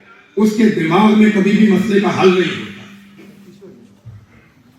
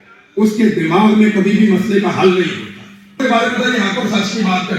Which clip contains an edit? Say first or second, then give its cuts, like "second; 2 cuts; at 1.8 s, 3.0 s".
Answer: second; 1 cut; at 3.2 s